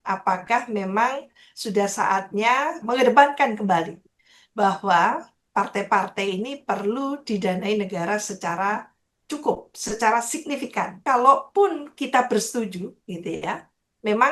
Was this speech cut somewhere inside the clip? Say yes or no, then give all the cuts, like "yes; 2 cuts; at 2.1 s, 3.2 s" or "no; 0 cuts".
yes; 2 cuts; at 2.8 s, 11.0 s